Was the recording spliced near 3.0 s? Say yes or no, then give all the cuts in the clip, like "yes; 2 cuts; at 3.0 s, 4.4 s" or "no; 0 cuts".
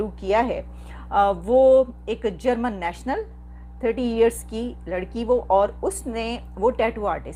no; 0 cuts